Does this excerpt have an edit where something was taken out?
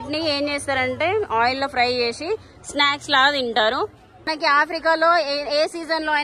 yes; 1 cut; at 4.3 s

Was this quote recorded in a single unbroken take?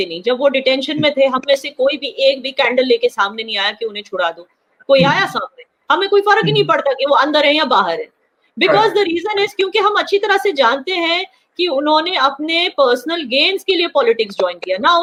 yes; 0 cuts

